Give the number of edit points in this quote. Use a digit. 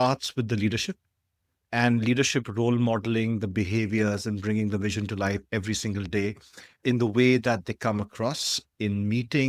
0